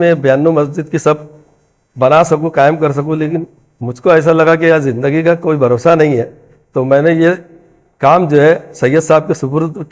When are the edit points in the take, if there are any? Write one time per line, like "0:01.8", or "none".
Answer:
none